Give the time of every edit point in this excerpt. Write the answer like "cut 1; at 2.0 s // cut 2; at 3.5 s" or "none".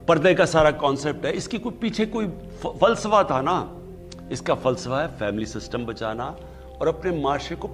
none